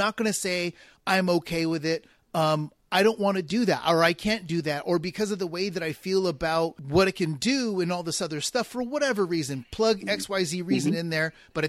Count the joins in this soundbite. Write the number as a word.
one